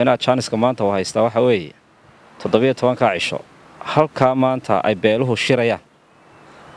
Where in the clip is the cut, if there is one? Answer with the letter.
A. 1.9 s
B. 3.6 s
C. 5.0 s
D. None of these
D